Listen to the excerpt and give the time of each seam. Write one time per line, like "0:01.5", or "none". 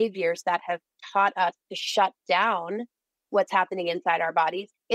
none

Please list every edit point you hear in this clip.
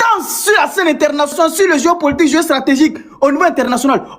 0:01.3

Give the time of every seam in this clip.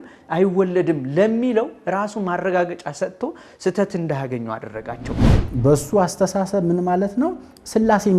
0:05.3

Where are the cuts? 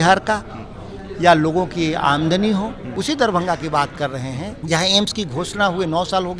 0:02.9
0:04.6

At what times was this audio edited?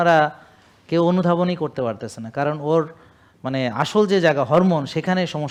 none

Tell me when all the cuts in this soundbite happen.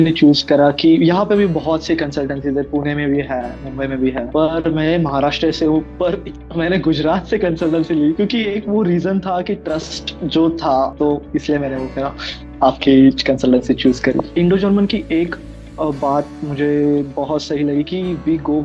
0:04.3
0:08.2
0:10.9
0:14.3

